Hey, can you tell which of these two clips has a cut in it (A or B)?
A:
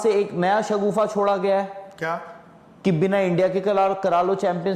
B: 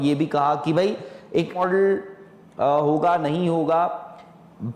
B